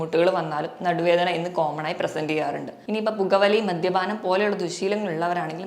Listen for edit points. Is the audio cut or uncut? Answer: cut